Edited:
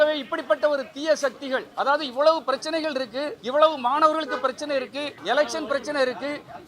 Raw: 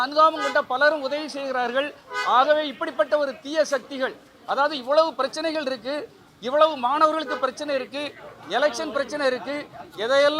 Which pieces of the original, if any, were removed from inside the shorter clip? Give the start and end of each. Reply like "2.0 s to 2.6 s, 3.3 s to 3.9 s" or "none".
4.2 s to 4.4 s, 6.1 s to 6.4 s, 8.1 s to 8.3 s

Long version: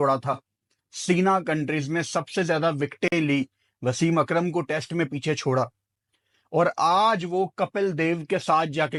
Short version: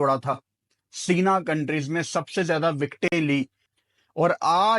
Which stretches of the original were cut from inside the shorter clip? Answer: 3.6 s to 6.0 s

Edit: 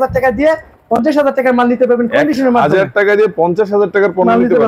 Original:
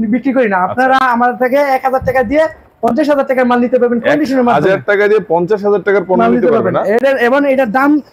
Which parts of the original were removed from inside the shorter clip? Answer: none

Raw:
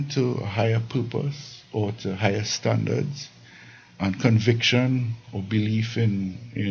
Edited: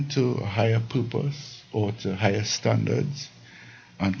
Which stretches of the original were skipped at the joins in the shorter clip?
none

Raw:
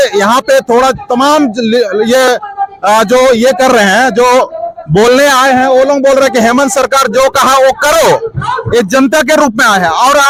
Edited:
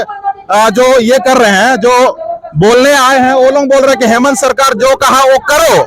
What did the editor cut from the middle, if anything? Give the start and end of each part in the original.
none

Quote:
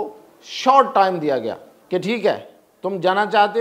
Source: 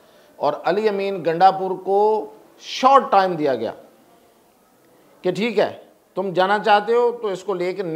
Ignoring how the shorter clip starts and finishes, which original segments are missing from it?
3.9 s to 5.0 s

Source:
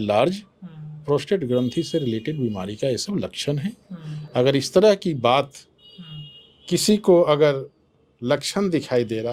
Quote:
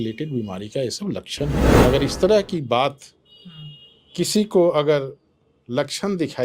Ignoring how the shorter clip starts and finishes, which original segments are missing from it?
3.8 s to 4.3 s

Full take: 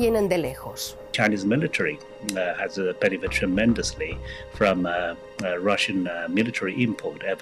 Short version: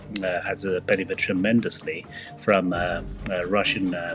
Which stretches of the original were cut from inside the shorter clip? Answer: none

